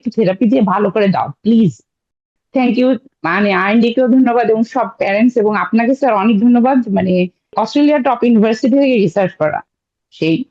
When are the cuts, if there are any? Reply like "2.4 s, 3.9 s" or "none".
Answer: 2.1 s, 7.5 s